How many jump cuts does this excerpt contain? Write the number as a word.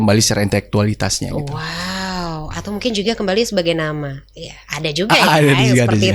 zero